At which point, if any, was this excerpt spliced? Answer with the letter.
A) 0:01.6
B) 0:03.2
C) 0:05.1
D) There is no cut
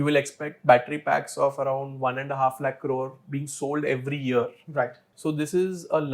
C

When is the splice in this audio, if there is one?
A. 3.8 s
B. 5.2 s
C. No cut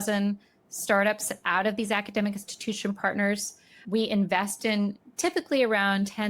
A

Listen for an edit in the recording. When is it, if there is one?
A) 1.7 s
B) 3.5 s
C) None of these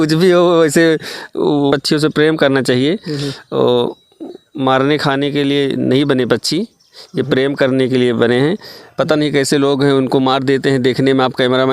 A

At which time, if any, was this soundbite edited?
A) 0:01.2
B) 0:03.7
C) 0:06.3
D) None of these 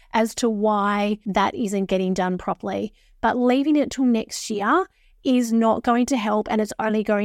A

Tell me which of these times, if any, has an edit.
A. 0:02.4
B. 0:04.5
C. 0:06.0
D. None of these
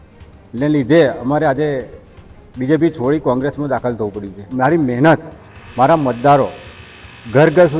B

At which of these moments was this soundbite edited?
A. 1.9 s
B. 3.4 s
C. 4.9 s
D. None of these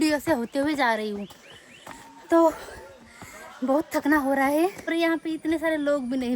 C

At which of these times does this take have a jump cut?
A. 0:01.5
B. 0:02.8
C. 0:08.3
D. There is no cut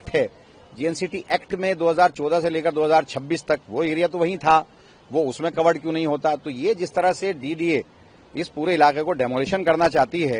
D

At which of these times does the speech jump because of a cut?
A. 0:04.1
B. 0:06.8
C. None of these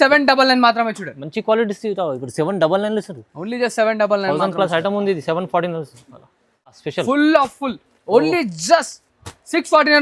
B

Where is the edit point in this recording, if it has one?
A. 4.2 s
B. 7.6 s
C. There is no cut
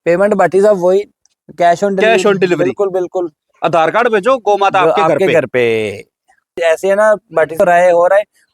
B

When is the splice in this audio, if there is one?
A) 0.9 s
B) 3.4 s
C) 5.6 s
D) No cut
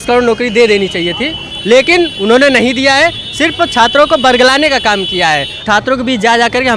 C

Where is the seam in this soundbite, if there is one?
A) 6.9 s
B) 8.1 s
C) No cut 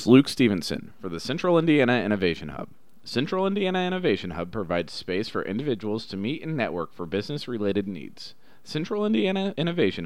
C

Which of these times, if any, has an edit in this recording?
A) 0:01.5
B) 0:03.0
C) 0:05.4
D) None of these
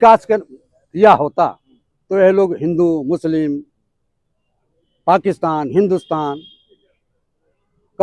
D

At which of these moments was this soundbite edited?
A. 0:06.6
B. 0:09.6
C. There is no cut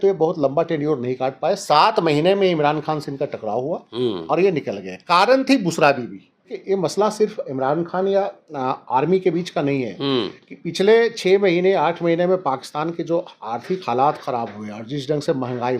A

